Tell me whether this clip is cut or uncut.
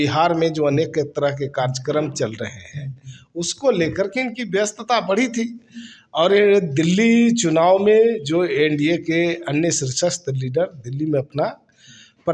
uncut